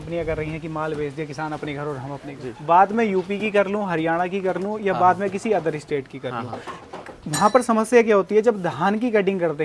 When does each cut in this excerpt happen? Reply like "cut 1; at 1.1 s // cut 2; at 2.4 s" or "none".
cut 1; at 2.5 s